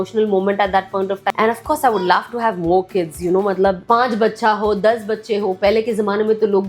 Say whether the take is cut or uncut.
cut